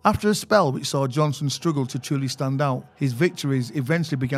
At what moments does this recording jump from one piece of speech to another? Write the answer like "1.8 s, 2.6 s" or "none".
2.9 s